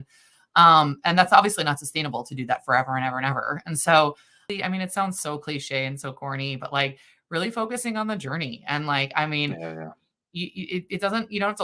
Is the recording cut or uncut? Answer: cut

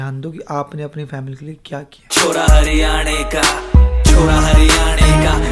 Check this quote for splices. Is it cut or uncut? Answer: cut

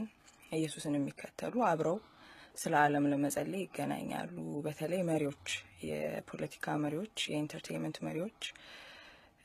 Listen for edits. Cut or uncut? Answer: uncut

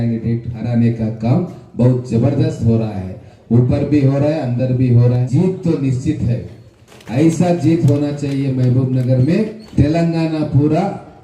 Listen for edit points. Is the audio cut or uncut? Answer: cut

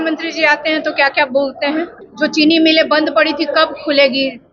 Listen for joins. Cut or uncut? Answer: cut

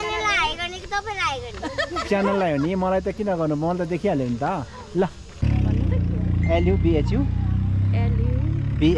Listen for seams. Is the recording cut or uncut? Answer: cut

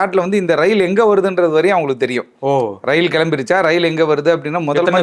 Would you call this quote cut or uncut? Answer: uncut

